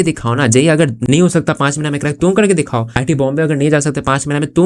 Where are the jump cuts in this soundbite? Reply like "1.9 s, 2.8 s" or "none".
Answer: 1.0 s